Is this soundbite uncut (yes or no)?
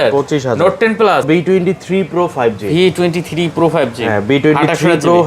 no